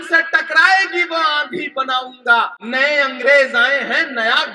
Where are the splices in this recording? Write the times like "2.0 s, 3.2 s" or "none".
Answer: 2.6 s